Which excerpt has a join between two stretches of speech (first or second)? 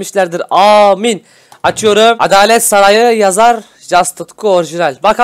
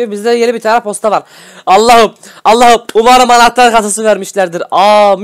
first